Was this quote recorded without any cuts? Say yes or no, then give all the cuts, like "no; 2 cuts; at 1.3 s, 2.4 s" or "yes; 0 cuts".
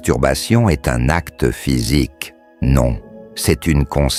yes; 0 cuts